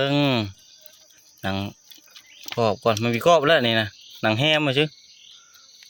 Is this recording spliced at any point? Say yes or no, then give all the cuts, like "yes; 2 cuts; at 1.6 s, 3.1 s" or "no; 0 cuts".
no; 0 cuts